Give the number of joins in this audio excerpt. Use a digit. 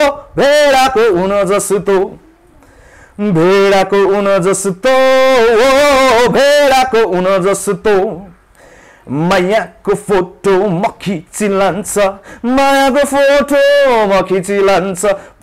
0